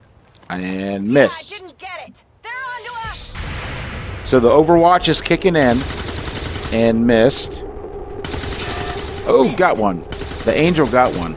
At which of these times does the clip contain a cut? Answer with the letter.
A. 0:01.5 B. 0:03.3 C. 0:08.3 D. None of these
B